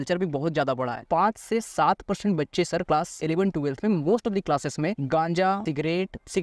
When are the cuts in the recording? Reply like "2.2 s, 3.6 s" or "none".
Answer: 1.0 s, 3.0 s, 5.0 s, 5.7 s